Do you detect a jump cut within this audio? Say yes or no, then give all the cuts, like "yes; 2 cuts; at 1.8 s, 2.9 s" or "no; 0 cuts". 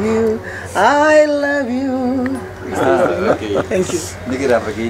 no; 0 cuts